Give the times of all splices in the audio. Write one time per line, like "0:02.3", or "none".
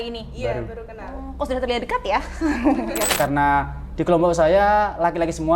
0:03.1